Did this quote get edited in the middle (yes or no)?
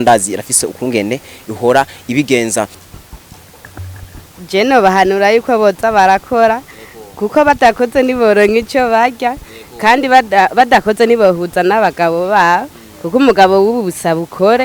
yes